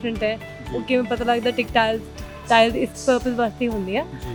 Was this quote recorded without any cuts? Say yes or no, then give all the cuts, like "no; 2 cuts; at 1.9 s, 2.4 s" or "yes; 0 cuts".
yes; 0 cuts